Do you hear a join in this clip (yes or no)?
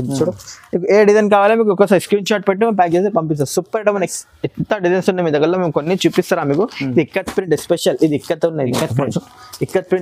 yes